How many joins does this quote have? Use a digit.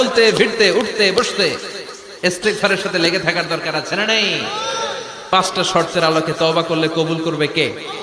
1